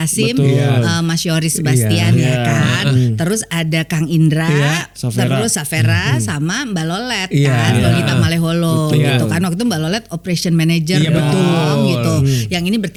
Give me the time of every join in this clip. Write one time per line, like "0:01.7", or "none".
none